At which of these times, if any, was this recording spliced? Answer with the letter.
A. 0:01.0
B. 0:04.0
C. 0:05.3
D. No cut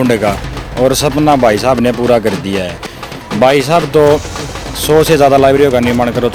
D